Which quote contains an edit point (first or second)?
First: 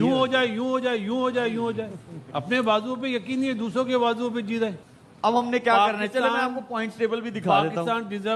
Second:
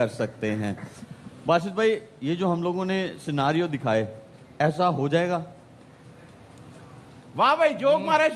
first